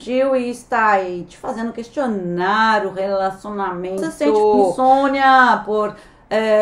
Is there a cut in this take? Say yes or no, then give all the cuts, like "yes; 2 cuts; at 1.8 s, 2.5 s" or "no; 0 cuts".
yes; 1 cut; at 4.7 s